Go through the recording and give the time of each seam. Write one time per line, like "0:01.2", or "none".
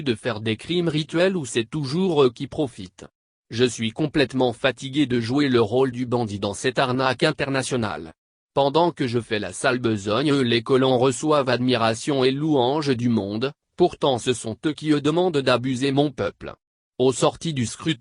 0:08.8